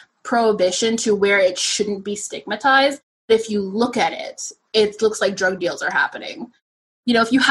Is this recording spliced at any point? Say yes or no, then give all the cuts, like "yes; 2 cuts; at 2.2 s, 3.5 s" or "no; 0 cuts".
yes; 1 cut; at 6.6 s